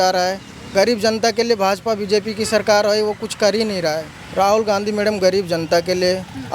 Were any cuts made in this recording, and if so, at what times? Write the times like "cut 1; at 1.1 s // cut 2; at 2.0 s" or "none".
cut 1; at 4.1 s